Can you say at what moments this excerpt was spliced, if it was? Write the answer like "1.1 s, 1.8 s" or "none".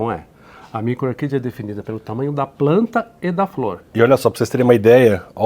3.9 s